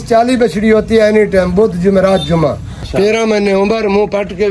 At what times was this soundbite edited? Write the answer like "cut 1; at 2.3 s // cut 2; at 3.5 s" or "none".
cut 1; at 2.7 s